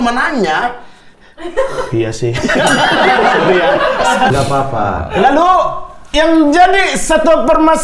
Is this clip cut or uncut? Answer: cut